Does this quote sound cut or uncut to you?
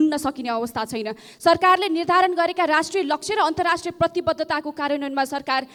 uncut